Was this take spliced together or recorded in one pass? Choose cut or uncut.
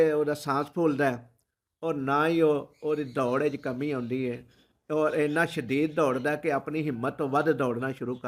uncut